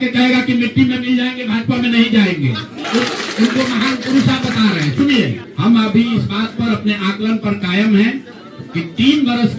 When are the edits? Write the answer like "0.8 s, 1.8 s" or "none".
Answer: 2.8 s, 5.4 s

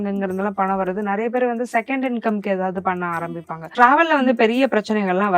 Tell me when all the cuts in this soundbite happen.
3.7 s

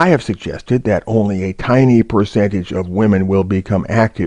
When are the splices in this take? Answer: 1.0 s

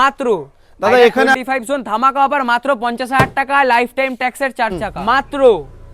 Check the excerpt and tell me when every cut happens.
1.3 s, 4.9 s

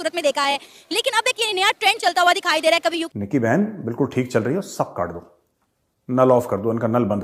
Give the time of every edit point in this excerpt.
3.1 s

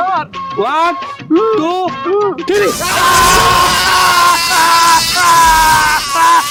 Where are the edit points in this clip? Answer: none

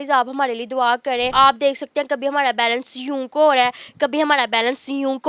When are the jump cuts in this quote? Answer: 1.3 s

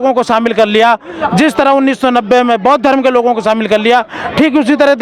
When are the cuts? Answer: none

